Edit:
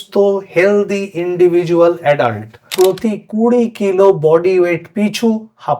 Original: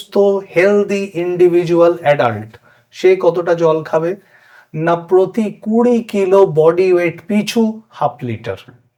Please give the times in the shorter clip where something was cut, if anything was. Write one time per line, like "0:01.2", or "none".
0:02.7